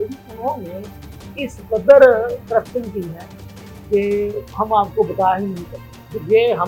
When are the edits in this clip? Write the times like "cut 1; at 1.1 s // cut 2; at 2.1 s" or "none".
none